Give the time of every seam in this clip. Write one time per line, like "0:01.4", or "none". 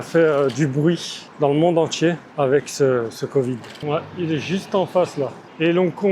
0:03.7